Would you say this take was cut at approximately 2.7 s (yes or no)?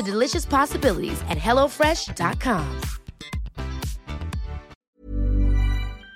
no